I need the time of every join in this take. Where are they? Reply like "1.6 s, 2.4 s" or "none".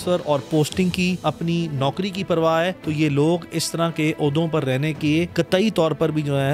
1.2 s, 2.8 s, 5.3 s